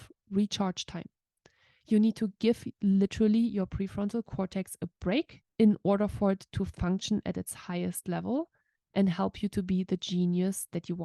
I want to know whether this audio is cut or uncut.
cut